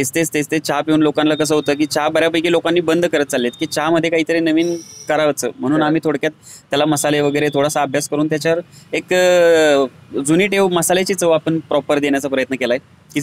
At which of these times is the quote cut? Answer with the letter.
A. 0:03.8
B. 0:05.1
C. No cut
C